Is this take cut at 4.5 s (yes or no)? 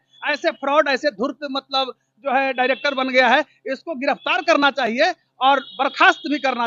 no